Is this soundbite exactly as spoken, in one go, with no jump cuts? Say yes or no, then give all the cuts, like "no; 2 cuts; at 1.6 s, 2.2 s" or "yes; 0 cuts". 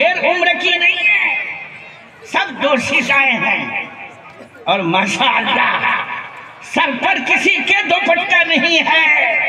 yes; 0 cuts